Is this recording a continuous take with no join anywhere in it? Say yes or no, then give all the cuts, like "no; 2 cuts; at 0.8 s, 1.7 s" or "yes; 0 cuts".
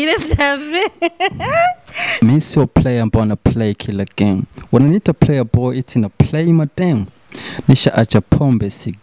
no; 1 cut; at 2.2 s